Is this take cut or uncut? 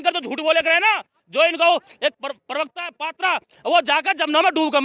uncut